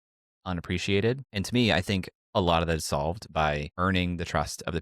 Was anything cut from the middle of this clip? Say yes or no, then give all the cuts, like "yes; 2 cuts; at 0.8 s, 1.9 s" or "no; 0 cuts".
yes; 2 cuts; at 1.3 s, 3.7 s